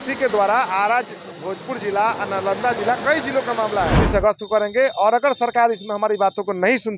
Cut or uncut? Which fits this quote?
cut